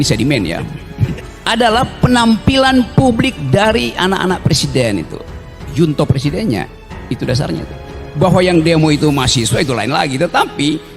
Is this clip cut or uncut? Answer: cut